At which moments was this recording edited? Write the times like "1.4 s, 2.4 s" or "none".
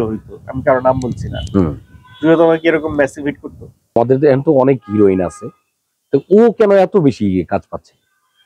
4.0 s